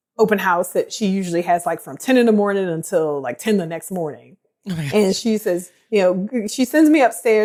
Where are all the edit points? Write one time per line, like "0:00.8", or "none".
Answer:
none